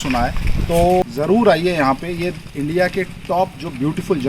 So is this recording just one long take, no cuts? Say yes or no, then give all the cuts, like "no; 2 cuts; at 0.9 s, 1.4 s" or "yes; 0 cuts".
no; 1 cut; at 1.0 s